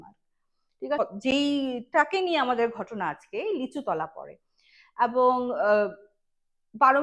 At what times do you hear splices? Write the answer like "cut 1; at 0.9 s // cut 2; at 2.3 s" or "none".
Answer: cut 1; at 1.0 s